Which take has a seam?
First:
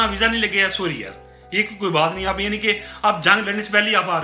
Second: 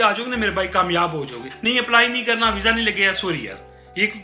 second; 1 cut; at 1.5 s

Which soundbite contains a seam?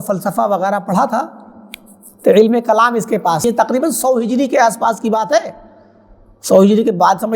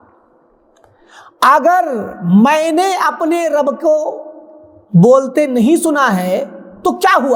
first; 1 cut; at 3.4 s

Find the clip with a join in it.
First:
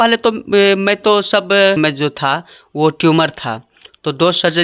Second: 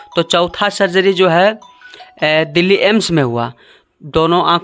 first; 1 cut; at 1.8 s

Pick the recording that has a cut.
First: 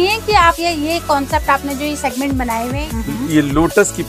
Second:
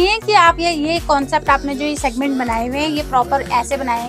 first; 1 cut; at 2.8 s

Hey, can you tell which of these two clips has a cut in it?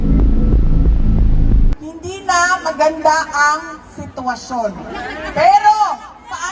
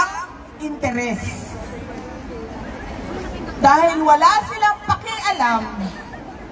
first; 1 cut; at 1.7 s

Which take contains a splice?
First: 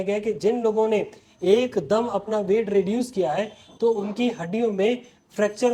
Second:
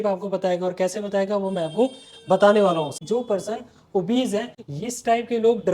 second; 2 cuts; at 3.0 s, 4.5 s

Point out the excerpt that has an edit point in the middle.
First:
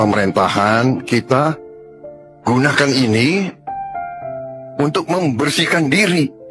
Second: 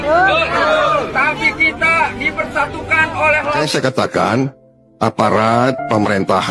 second; 1 cut; at 3.6 s

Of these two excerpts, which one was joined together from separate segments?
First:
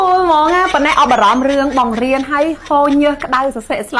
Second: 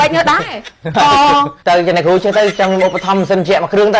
second; 1 cut; at 1.5 s

